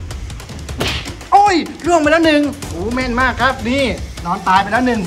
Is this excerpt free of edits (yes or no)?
yes